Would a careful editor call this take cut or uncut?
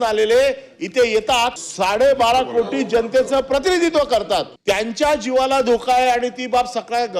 cut